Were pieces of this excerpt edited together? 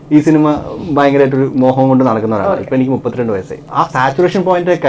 yes; 1 cut; at 3.6 s

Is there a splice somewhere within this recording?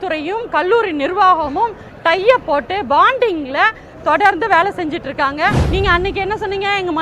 yes; 1 cut; at 5.6 s

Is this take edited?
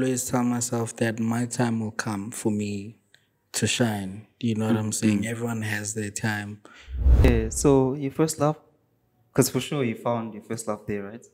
yes; 1 cut; at 7.2 s

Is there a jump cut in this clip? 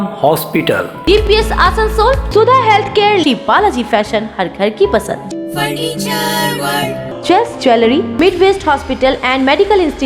no; 0 cuts

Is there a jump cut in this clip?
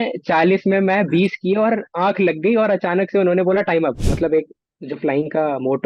yes; 1 cut; at 4.1 s

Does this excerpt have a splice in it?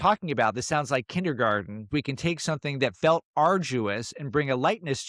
yes; 1 cut; at 1.9 s

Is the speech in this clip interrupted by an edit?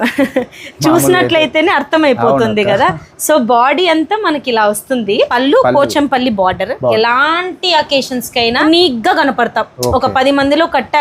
yes; 3 cuts; at 5.3 s, 6.9 s, 8.6 s

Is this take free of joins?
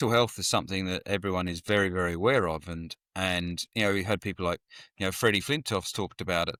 yes; 0 cuts

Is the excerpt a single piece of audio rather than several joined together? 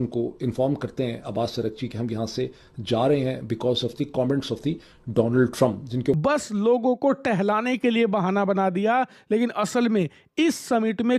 no; 1 cut; at 6.2 s

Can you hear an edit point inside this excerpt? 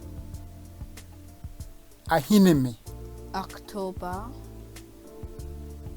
yes; 2 cuts; at 1.7 s, 4.3 s

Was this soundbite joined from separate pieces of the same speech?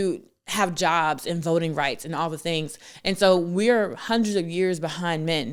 no; 0 cuts

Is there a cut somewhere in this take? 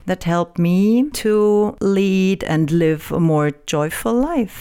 no; 0 cuts

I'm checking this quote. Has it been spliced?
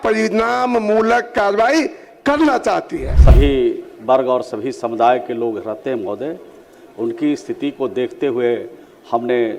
yes; 1 cut; at 3.0 s

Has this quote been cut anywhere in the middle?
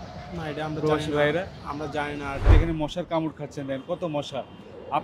yes; 1 cut; at 2.5 s

